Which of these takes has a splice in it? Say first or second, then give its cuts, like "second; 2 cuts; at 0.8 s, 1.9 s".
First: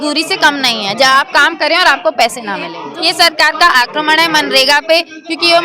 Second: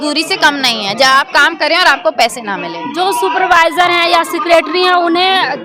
first; 1 cut; at 2.8 s